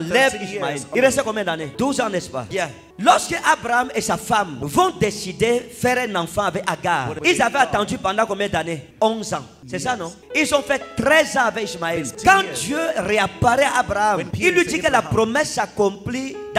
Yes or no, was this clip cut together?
no